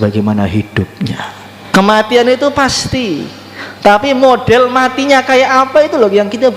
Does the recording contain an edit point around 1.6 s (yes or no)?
yes